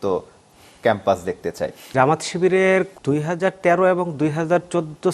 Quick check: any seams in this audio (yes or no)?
yes